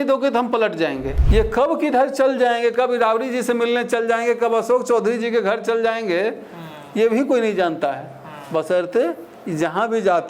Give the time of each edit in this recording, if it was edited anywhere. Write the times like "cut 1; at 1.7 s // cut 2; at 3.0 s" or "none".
cut 1; at 1.1 s